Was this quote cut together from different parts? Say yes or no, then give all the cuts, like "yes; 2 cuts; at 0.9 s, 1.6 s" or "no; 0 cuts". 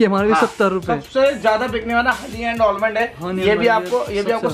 no; 0 cuts